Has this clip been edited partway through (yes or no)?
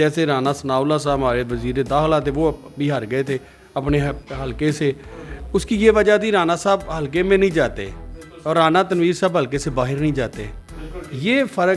no